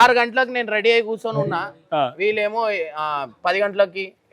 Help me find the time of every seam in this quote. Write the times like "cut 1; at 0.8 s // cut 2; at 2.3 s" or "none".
none